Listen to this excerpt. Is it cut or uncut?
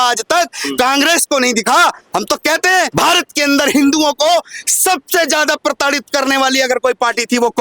cut